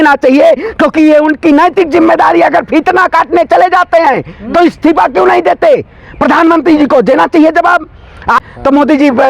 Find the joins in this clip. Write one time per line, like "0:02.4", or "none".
0:08.4